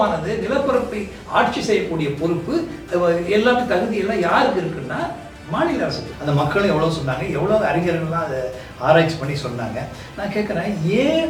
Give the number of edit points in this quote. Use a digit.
1